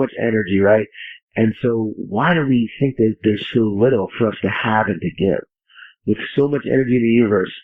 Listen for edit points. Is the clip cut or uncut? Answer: uncut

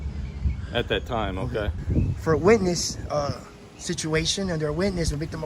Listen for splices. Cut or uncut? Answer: cut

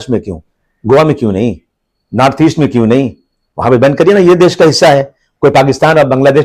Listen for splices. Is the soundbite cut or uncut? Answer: uncut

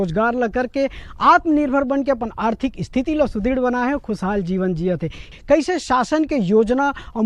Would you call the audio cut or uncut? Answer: cut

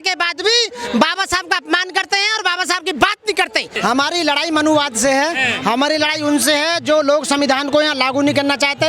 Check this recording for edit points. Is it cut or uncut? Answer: cut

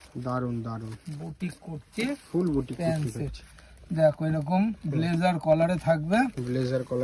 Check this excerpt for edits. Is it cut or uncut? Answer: uncut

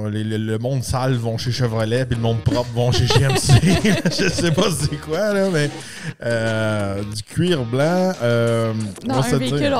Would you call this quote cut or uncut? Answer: uncut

